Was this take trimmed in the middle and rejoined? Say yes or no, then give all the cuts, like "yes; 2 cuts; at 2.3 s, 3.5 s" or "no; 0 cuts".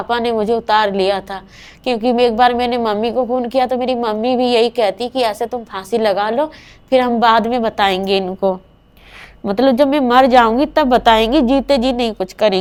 no; 0 cuts